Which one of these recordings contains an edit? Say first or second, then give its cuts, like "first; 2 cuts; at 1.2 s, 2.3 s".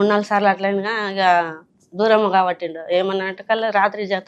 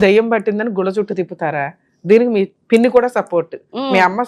second; 1 cut; at 2.6 s